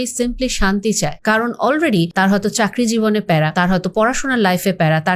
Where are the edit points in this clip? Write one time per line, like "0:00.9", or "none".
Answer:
0:01.2
0:02.1
0:03.5

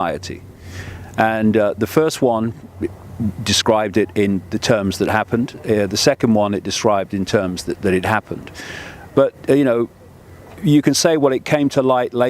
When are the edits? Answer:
0:07.1

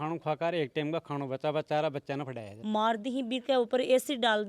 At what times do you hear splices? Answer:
0:02.5

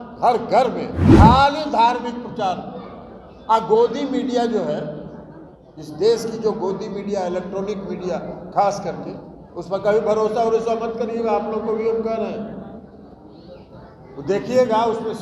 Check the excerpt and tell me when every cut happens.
0:01.0

